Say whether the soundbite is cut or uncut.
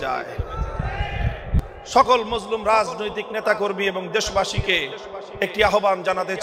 cut